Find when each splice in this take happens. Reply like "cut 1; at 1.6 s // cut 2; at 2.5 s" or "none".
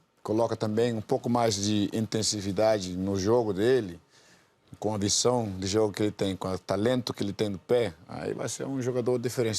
none